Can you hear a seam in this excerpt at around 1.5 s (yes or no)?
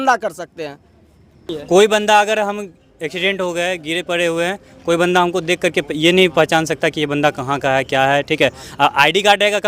yes